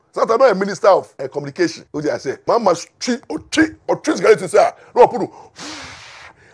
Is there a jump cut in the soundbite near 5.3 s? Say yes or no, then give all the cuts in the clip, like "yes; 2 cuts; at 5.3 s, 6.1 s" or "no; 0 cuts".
no; 1 cut; at 1.7 s